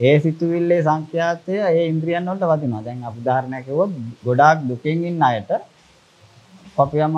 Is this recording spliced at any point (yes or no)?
no